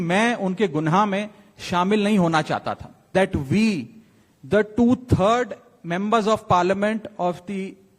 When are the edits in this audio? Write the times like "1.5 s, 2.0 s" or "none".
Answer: 2.9 s

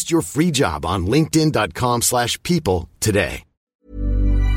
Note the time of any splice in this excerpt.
3.7 s

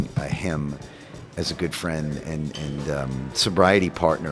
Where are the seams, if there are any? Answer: 3.3 s

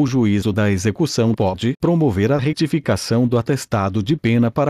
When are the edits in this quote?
0.9 s

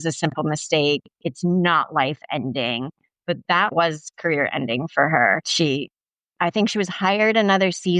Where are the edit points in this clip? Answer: 3.7 s, 5.5 s

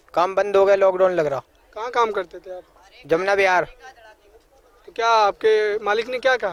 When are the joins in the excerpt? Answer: none

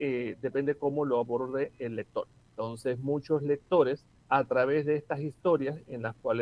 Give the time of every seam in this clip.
2.4 s, 4.1 s

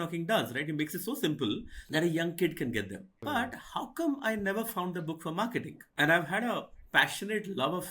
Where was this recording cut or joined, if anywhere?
1.8 s

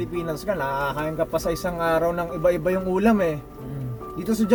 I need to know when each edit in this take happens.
none

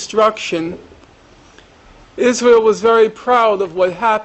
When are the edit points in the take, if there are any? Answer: 3.2 s

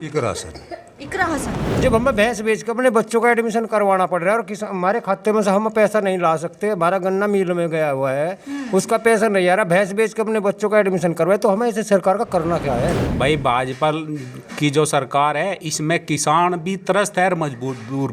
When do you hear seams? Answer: 1.6 s, 13.0 s

